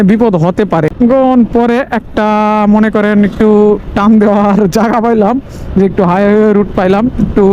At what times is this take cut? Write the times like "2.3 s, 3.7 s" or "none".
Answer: 0.9 s